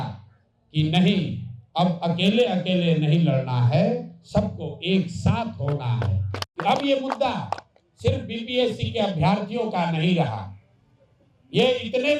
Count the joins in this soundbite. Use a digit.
1